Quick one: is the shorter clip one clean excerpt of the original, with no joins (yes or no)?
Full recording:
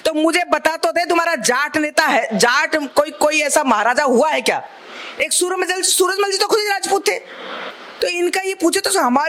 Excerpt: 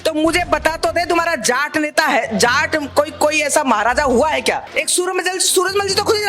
no